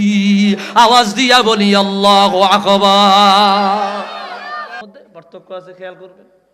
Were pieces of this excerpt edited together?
yes; 1 cut; at 4.8 s

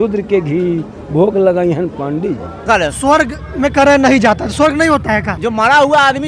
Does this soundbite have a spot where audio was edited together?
yes; 2 cuts; at 2.7 s, 5.4 s

